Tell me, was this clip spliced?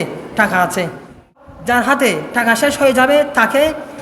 yes; 1 cut; at 1.4 s

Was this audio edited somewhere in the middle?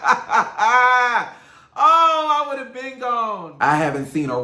yes; 1 cut; at 3.5 s

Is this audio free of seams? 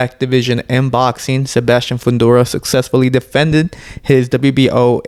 yes; 0 cuts

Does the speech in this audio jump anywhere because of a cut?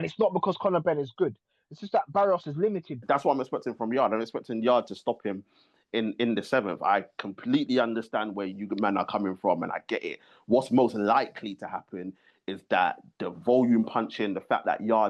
yes; 1 cut; at 3.0 s

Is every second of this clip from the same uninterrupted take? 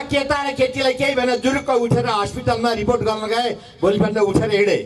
yes; 0 cuts

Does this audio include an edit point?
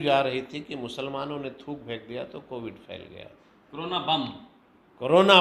no; 0 cuts

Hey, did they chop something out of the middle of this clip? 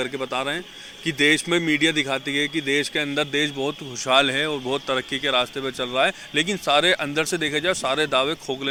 no; 0 cuts

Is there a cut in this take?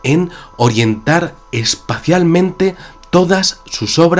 no; 0 cuts

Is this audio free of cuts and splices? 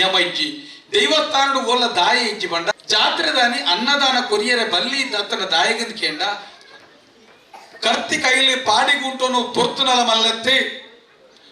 no; 2 cuts; at 2.7 s, 6.5 s

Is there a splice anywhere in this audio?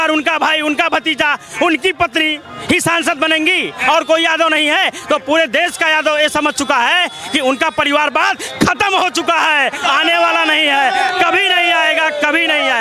no; 0 cuts

